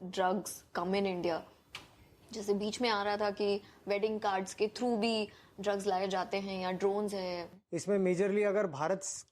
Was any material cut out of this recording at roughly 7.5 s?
yes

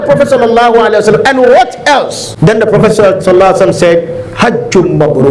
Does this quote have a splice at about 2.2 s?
yes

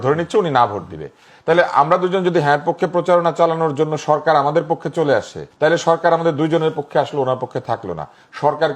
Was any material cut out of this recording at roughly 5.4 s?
yes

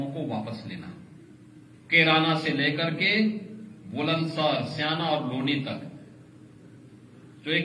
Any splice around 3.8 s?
no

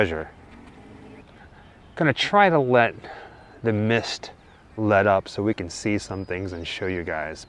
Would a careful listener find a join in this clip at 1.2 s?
yes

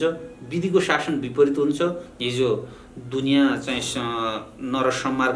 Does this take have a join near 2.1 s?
yes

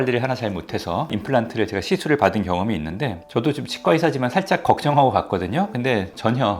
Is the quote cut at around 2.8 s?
no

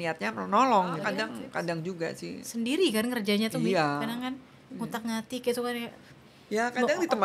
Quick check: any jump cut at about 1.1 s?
yes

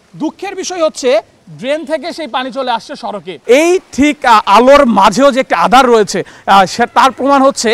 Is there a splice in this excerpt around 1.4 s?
no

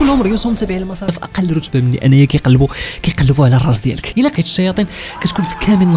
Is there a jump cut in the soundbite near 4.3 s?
yes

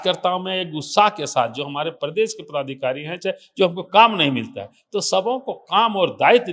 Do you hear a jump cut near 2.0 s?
no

